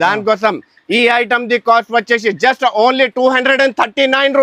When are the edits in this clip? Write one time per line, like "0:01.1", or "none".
none